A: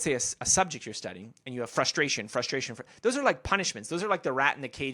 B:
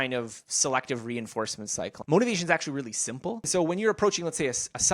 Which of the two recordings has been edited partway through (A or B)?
B